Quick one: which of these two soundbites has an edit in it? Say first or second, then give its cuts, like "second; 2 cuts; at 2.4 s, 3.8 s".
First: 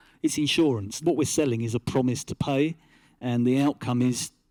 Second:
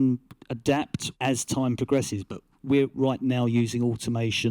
second; 2 cuts; at 1.0 s, 2.9 s